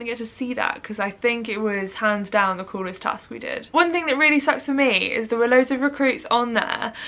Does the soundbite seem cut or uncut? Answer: uncut